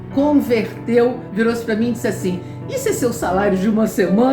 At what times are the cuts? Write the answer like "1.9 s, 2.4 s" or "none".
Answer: 1.2 s

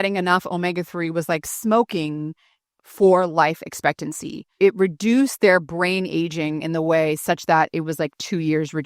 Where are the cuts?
4.5 s

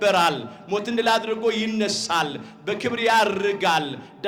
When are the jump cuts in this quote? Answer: none

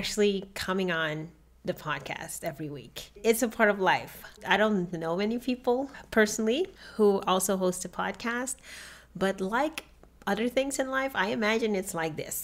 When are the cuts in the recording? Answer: 3.0 s, 6.8 s

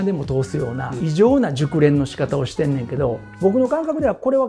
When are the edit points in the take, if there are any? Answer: 0.9 s, 3.3 s

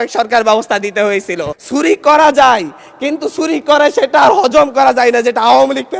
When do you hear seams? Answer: 1.5 s

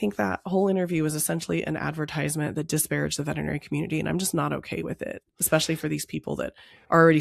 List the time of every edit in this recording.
none

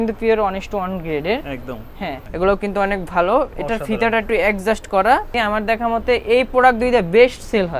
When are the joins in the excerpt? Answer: 2.2 s, 5.3 s

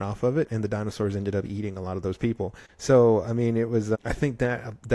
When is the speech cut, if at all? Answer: 2.7 s, 4.0 s

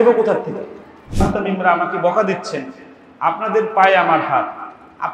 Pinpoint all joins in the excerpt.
1.4 s

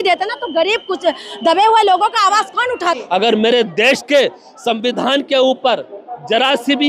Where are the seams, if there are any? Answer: 3.0 s

